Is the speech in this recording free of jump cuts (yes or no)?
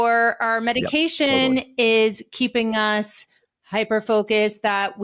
yes